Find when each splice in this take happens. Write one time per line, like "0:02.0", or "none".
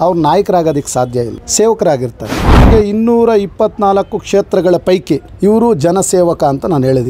0:01.4
0:02.6
0:05.3